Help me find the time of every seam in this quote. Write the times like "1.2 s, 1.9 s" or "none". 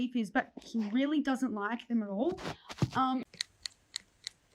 3.2 s